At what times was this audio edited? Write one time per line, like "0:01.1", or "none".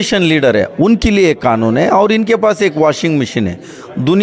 none